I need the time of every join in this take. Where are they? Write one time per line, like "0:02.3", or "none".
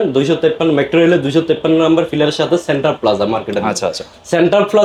none